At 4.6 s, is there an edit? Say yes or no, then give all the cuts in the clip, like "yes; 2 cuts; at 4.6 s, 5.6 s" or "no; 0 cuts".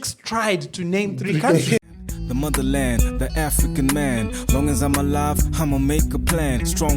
no; 1 cut; at 1.8 s